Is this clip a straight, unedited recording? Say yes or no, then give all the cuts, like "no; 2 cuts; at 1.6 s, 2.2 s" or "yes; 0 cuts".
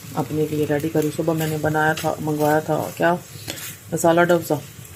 yes; 0 cuts